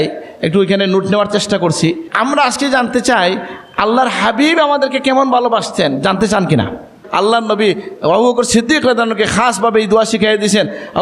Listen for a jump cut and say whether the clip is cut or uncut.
cut